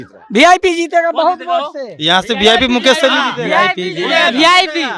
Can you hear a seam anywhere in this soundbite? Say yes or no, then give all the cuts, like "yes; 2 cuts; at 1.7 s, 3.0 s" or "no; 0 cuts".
no; 0 cuts